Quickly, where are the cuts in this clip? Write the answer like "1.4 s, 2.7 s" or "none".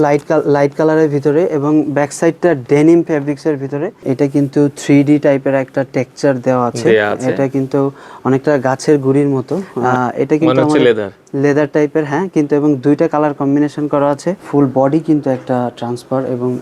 4.1 s, 9.8 s, 14.4 s

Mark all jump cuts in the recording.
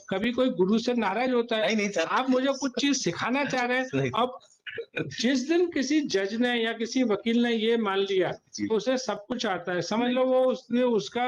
none

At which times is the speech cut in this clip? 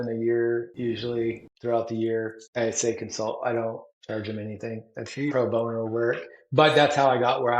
1.0 s, 2.4 s, 3.9 s

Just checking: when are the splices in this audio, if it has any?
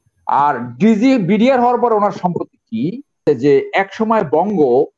3.2 s

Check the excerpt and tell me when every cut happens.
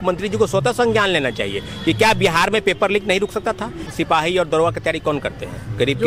3.9 s

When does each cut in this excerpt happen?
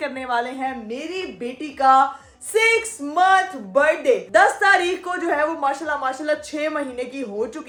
none

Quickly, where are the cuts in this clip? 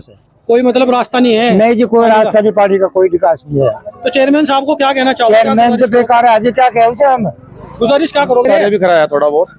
8.4 s

